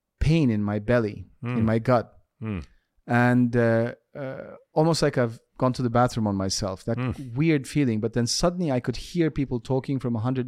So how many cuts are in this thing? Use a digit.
0